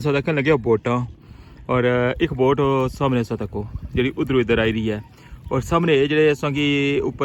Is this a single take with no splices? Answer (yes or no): yes